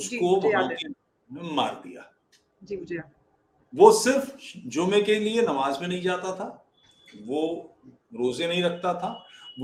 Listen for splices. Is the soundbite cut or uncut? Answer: uncut